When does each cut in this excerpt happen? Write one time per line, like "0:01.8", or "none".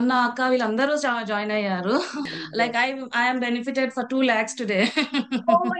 0:02.2